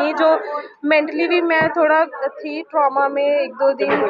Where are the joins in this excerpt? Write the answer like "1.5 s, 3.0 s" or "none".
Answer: none

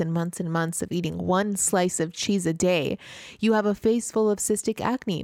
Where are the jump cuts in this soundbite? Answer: none

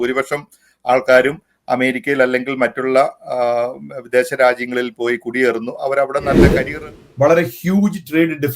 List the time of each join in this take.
6.5 s

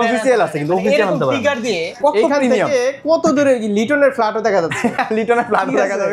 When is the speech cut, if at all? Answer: 1.9 s

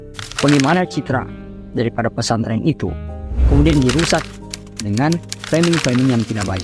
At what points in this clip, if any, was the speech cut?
none

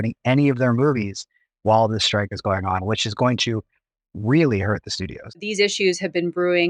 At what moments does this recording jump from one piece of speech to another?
5.4 s

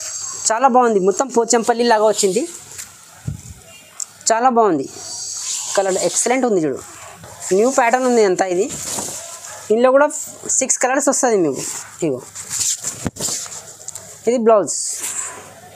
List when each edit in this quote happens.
none

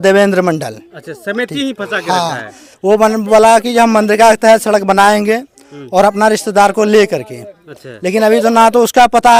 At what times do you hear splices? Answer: none

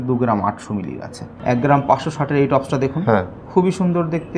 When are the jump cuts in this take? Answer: 1.3 s

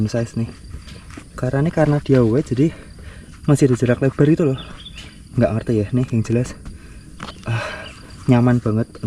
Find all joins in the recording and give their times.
none

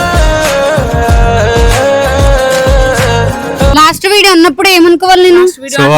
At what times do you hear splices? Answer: 3.7 s

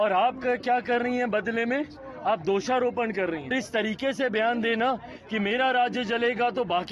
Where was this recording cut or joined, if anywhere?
3.5 s

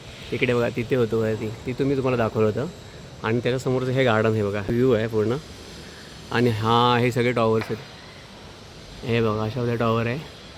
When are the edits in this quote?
4.7 s

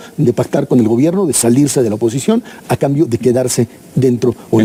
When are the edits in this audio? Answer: none

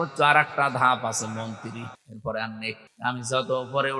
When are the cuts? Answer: 2.0 s, 2.9 s

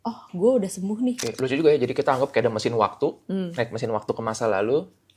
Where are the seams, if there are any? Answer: 1.2 s

